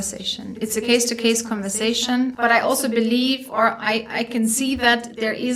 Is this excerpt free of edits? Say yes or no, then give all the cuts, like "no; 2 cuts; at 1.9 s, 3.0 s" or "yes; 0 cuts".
no; 1 cut; at 2.3 s